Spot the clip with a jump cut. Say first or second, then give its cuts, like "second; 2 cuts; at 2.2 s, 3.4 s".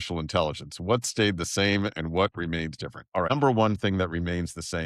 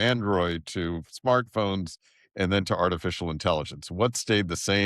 first; 1 cut; at 3.3 s